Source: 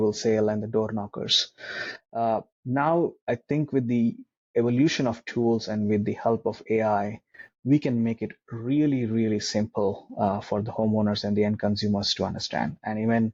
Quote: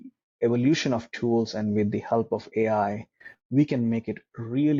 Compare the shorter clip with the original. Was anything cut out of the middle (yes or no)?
no